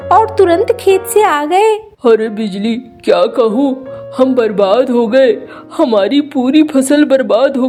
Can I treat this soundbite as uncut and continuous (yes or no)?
yes